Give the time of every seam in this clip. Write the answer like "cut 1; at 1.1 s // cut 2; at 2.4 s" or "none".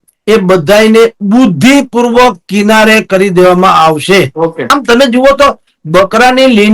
cut 1; at 4.6 s